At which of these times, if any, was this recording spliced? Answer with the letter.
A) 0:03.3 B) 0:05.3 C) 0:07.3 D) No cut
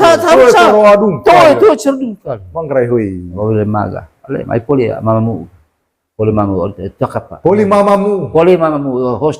A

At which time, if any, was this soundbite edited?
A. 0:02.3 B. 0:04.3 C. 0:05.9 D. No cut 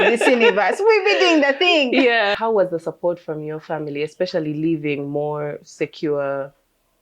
A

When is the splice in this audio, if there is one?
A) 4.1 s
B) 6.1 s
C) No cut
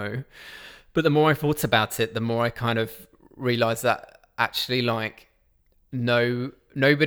C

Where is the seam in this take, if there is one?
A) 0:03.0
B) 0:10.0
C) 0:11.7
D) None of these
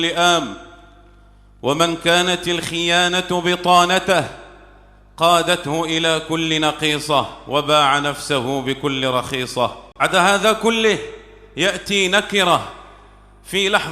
B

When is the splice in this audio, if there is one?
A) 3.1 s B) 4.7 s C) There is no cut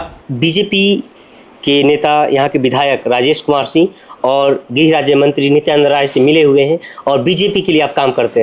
C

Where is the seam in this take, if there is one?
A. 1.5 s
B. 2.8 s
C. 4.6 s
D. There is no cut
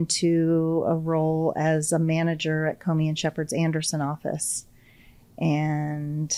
D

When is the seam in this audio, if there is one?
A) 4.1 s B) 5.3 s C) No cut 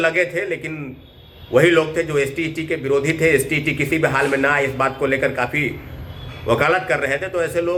C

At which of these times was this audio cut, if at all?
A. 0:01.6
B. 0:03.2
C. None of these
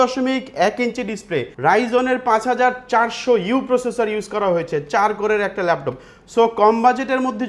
C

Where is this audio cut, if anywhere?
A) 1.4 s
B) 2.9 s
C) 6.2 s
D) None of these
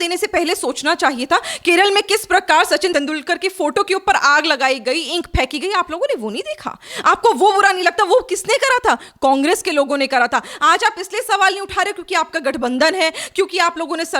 B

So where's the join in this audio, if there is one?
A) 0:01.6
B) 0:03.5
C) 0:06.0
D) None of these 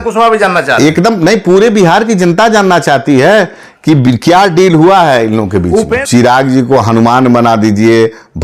C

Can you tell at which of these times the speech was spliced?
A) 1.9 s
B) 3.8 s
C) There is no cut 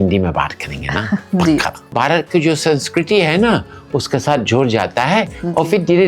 A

